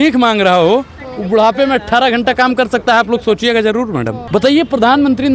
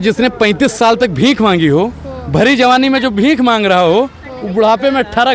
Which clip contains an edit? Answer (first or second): first